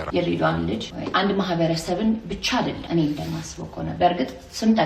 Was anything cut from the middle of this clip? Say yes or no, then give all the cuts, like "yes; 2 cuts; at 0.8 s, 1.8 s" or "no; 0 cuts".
yes; 2 cuts; at 0.9 s, 2.8 s